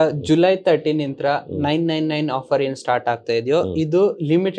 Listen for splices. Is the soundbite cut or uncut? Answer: uncut